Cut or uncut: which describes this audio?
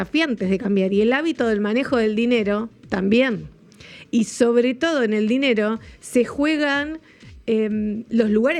uncut